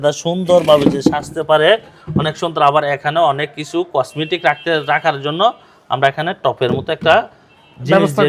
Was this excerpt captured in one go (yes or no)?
yes